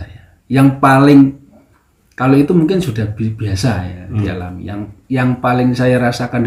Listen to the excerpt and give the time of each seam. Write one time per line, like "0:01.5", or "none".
none